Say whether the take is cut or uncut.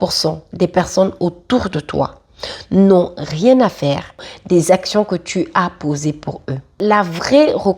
cut